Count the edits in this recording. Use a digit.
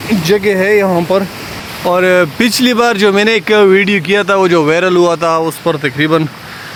0